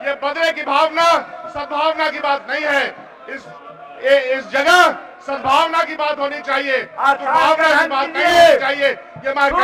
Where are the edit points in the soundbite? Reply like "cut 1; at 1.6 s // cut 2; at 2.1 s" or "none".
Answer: none